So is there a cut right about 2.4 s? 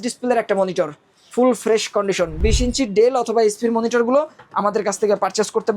yes; 1 cut; at 2.4 s

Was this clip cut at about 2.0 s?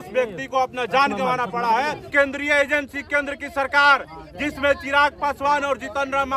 yes; 1 cut; at 2.0 s

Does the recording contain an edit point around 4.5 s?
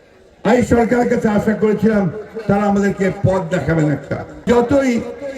yes; 1 cut; at 4.5 s

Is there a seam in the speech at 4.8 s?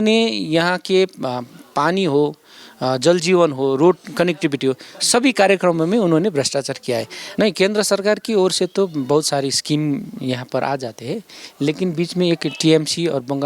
no; 1 cut; at 7.2 s

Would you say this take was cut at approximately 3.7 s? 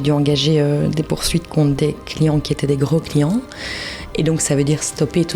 no; 0 cuts

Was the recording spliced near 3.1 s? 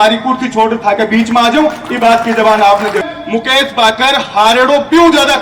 yes; 1 cut; at 3.1 s

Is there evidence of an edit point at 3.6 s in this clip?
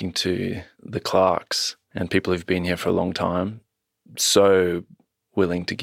no; 0 cuts

